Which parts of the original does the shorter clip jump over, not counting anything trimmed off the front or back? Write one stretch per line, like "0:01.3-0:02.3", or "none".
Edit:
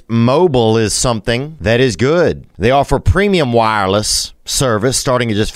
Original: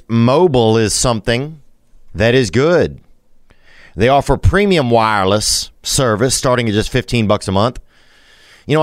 0:01.5-0:02.1
0:03.0-0:03.8